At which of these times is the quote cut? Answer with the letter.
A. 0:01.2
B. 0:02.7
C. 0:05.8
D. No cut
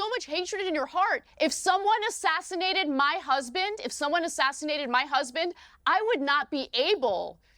A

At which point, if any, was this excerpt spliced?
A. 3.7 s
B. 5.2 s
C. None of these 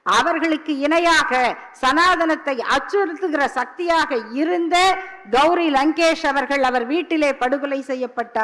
C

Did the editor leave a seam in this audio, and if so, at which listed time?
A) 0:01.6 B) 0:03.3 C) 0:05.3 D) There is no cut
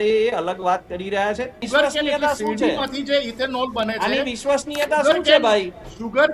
A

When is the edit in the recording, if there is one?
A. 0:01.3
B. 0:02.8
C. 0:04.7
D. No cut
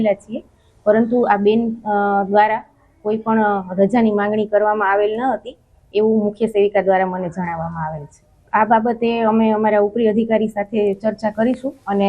C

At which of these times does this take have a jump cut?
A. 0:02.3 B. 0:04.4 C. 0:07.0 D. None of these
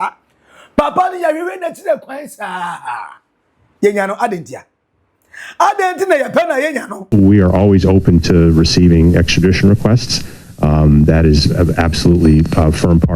C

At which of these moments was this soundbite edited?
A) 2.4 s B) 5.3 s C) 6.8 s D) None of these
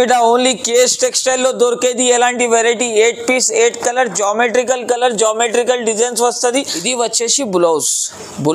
C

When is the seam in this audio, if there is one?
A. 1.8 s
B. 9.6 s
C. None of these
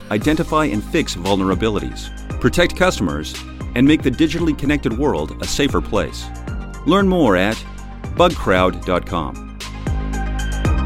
B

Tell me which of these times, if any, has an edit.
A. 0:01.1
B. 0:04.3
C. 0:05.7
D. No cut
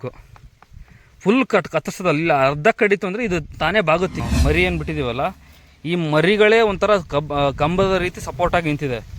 B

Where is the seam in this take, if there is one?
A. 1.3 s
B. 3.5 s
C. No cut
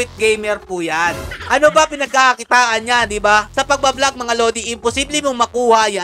A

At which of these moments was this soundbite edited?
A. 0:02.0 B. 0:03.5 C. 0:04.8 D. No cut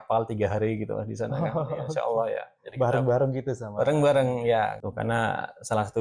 C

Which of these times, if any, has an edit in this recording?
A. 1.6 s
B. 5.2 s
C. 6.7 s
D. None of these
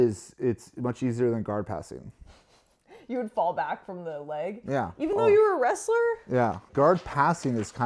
C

